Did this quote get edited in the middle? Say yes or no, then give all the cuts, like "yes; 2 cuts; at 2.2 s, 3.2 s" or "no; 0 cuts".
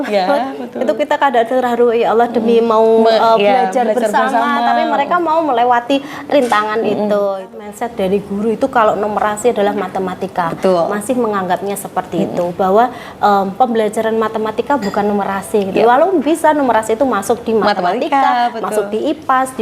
yes; 1 cut; at 7.6 s